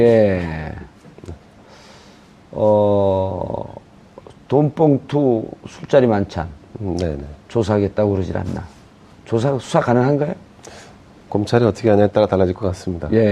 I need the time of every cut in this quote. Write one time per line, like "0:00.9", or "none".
none